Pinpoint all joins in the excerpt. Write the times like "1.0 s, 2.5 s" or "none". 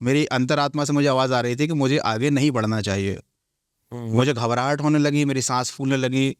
none